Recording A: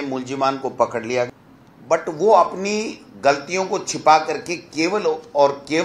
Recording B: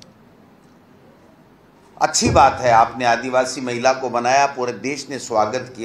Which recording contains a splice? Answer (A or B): A